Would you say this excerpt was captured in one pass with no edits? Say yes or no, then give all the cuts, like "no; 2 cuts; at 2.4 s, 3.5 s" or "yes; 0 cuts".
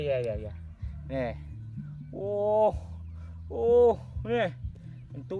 yes; 0 cuts